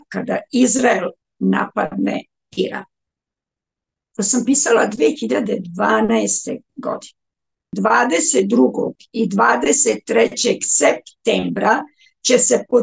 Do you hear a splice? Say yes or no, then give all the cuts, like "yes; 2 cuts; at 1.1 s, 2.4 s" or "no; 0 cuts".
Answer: yes; 1 cut; at 7.7 s